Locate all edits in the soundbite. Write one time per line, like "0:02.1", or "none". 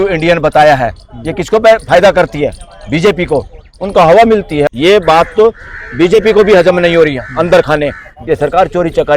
0:04.7
0:08.1

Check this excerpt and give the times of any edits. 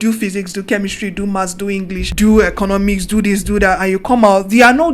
0:02.0

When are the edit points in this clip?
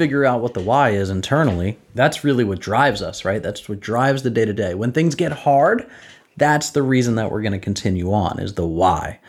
0:01.8

